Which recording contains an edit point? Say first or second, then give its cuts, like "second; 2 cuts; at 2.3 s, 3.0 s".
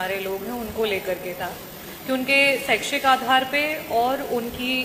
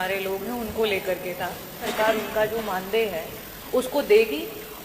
second; 1 cut; at 1.8 s